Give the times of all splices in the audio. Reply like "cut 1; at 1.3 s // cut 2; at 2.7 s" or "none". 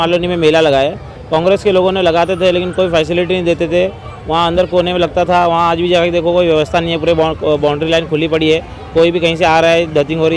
none

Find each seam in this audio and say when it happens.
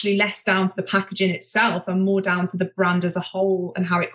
none

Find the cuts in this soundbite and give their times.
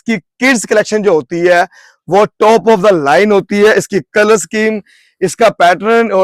none

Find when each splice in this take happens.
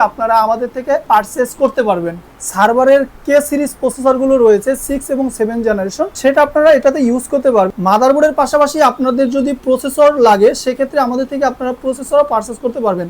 cut 1; at 2.2 s // cut 2; at 7.7 s

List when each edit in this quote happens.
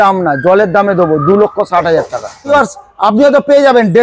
cut 1; at 2.5 s

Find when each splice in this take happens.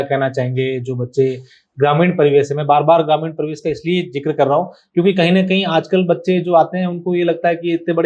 none

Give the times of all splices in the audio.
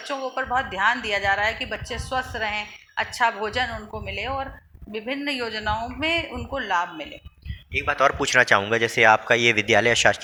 none

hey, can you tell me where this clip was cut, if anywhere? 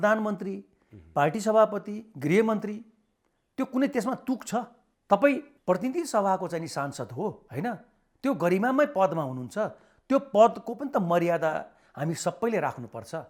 none

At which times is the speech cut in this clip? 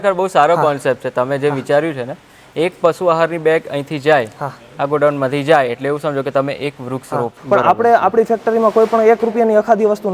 cut 1; at 7.3 s

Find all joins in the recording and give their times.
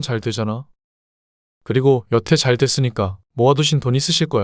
cut 1; at 3.2 s

